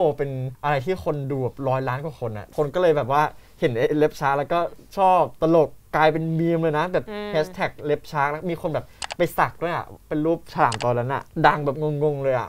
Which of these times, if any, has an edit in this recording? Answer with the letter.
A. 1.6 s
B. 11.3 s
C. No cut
B